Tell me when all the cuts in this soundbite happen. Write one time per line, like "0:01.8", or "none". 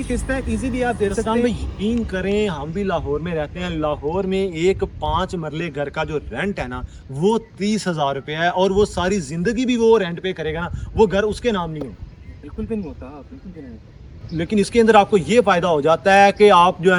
none